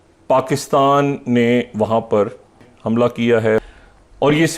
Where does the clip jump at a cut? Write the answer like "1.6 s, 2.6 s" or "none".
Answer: 2.7 s, 3.6 s